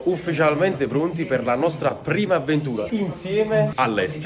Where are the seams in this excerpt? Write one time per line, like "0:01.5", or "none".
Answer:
none

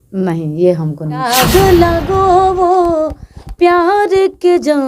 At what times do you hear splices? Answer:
0:01.2

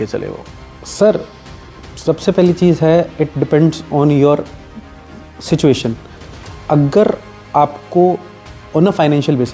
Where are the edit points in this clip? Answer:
none

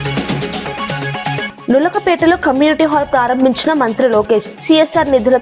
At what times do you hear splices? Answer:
0:01.5

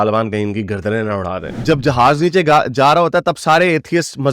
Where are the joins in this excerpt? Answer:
0:01.6

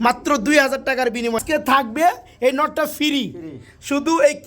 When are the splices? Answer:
0:01.4

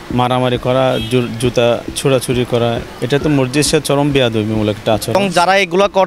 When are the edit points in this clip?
0:02.9
0:05.1

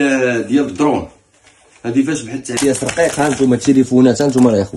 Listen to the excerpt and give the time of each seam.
0:02.5

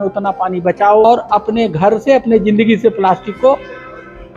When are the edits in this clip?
0:01.0

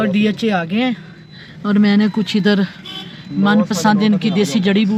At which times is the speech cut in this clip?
none

